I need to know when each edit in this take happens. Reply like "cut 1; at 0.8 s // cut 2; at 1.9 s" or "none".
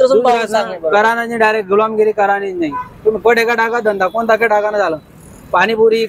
none